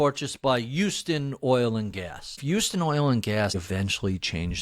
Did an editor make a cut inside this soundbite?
yes; 2 cuts; at 2.2 s, 3.6 s

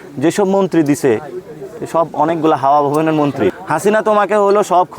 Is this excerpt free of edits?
no; 1 cut; at 3.6 s

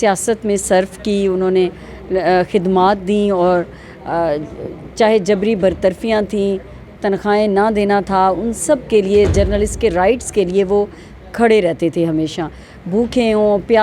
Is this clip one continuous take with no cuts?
yes; 0 cuts

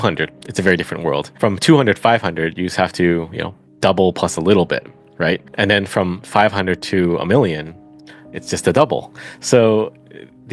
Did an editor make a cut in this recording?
yes; 2 cuts; at 1.3 s, 5.5 s

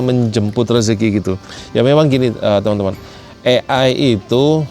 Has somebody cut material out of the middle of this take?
no; 0 cuts

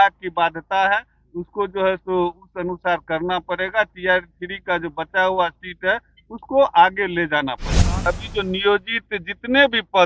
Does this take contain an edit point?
yes; 1 cut; at 8.0 s

